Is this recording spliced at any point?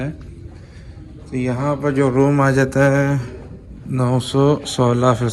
no; 0 cuts

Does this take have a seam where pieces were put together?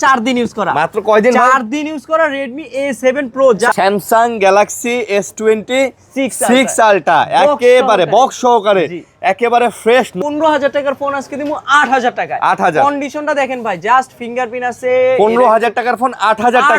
yes; 2 cuts; at 3.7 s, 10.1 s

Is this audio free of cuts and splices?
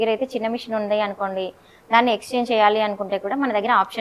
yes; 0 cuts

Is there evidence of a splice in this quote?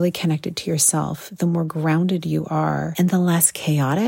yes; 1 cut; at 2.9 s

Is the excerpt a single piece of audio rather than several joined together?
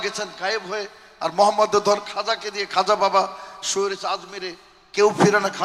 yes; 0 cuts

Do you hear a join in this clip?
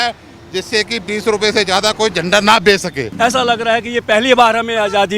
yes; 1 cut; at 3.0 s

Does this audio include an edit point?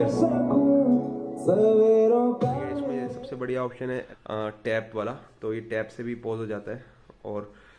yes; 2 cuts; at 2.8 s, 4.2 s

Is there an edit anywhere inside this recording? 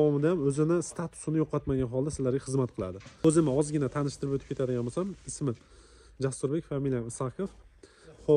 yes; 1 cut; at 3.2 s

